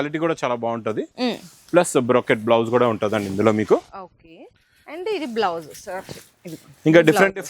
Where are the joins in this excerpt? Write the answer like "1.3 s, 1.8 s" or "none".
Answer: none